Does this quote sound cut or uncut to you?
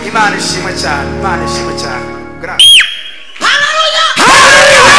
cut